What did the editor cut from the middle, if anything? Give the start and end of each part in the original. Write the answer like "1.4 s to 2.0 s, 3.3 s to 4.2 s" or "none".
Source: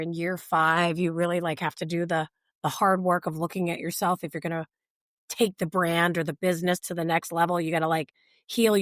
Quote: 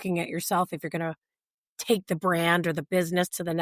none